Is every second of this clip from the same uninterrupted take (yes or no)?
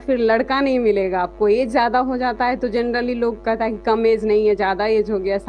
yes